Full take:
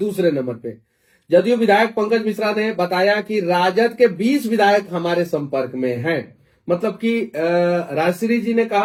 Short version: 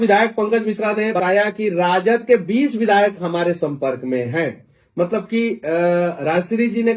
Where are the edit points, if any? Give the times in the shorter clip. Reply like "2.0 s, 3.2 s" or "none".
1.2 s